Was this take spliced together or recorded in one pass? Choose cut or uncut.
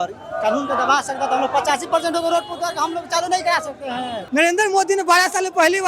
cut